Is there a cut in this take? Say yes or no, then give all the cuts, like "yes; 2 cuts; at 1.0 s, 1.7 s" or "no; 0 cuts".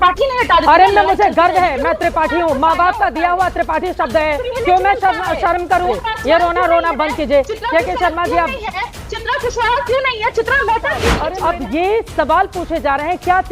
yes; 2 cuts; at 6.0 s, 11.2 s